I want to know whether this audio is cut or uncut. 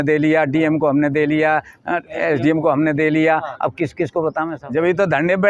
cut